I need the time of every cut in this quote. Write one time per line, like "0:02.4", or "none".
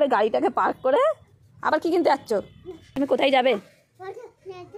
0:02.9